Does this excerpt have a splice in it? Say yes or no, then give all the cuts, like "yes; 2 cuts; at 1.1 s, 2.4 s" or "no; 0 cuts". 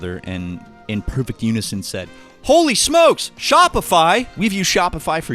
yes; 1 cut; at 4.3 s